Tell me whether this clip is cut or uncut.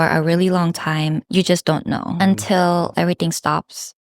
cut